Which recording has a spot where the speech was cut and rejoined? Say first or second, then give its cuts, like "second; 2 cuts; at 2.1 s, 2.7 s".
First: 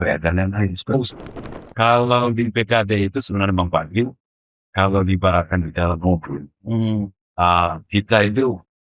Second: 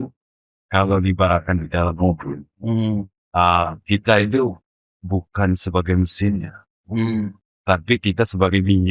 first; 1 cut; at 1.1 s